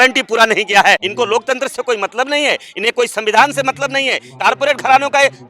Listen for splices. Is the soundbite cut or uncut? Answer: cut